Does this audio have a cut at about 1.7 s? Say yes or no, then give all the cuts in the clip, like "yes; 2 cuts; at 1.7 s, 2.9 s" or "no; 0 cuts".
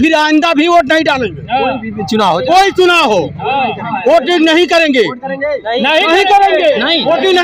no; 0 cuts